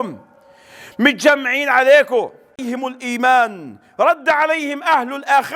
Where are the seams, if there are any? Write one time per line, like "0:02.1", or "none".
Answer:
0:02.5